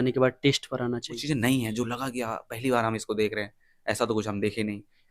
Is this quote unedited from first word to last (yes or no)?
no